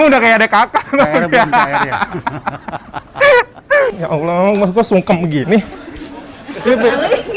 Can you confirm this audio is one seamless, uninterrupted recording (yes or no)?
no